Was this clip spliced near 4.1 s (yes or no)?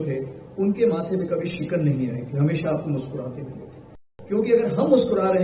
yes